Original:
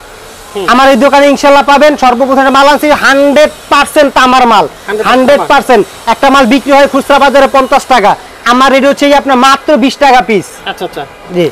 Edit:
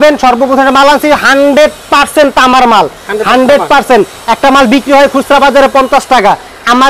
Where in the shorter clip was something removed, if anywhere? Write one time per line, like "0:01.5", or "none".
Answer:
none